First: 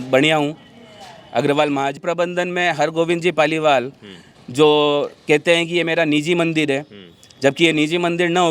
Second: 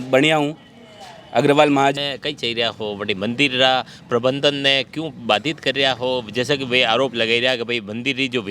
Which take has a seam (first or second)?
first